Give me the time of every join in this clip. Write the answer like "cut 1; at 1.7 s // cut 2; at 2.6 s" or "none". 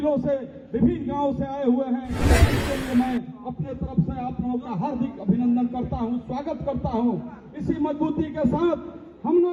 none